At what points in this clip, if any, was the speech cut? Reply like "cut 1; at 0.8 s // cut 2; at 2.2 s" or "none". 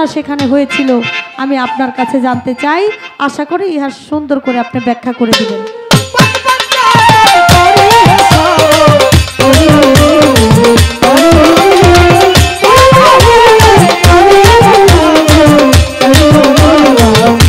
none